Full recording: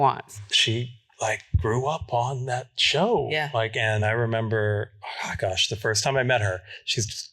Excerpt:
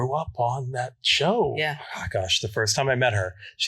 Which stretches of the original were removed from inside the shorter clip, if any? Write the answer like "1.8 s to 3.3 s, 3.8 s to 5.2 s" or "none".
3.5 s to 5.0 s